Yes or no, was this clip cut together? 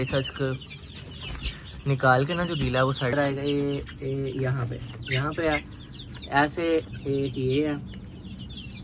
yes